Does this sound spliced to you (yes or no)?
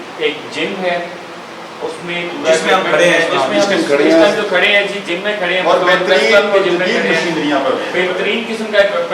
no